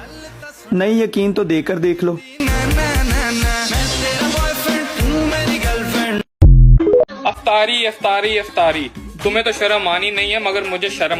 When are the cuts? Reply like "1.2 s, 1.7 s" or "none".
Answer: 7.1 s